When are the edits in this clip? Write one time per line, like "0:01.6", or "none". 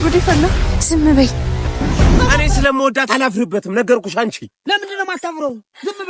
0:02.4